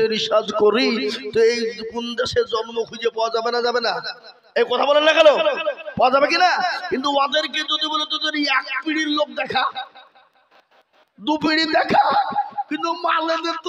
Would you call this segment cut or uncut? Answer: uncut